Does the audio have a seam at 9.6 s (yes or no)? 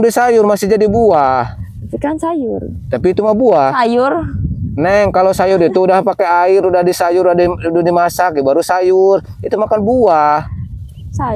no